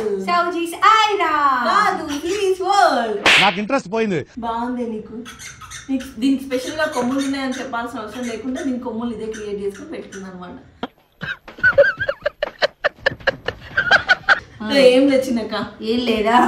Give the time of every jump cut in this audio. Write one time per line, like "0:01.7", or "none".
0:14.4

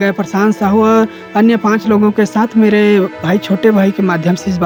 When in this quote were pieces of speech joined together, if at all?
none

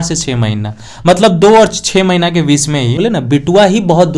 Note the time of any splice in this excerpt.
0:03.0

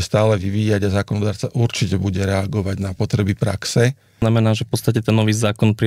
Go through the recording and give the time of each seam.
0:04.2

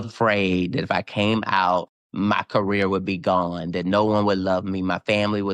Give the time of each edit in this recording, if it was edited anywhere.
0:02.0

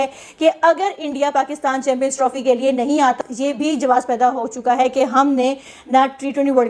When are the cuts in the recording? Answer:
0:03.2

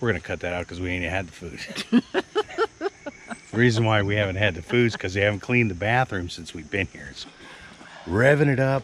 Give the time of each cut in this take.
0:07.1

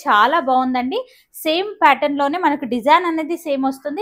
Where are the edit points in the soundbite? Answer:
none

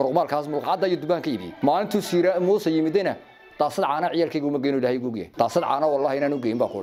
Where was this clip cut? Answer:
0:01.5
0:05.2

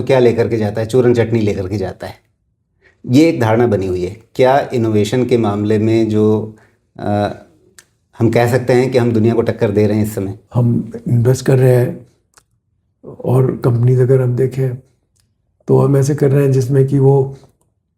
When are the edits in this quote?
0:10.4

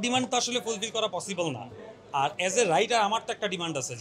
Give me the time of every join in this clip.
none

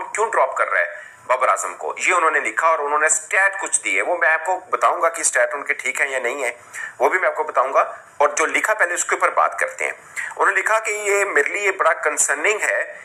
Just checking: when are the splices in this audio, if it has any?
none

